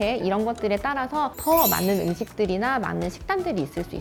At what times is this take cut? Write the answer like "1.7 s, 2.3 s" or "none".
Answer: none